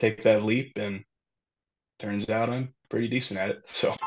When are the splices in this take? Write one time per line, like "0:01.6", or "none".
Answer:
0:02.8